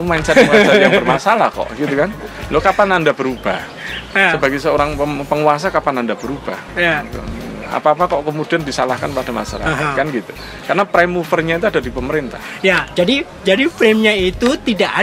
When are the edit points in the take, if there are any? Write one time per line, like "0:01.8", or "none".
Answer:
none